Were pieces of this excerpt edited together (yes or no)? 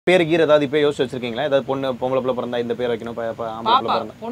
no